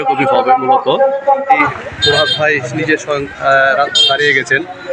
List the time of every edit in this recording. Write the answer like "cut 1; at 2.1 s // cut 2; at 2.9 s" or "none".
cut 1; at 1.6 s

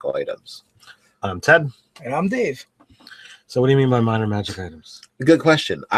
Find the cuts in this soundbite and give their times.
cut 1; at 2.2 s

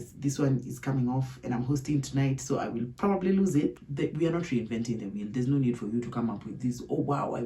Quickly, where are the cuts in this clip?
cut 1; at 3.8 s

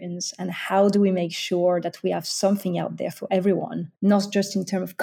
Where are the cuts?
cut 1; at 3.8 s

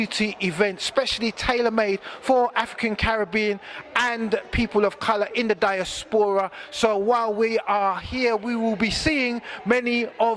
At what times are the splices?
none

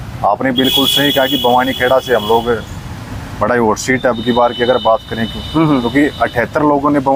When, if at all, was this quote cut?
none

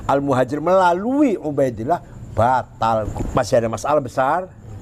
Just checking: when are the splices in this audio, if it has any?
cut 1; at 3.1 s

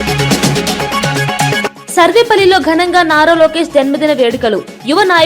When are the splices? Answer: cut 1; at 1.8 s

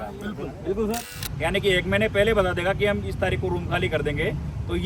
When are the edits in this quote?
cut 1; at 1.2 s

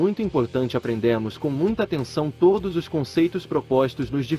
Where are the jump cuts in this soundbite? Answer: none

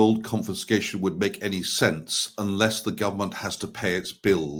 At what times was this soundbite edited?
none

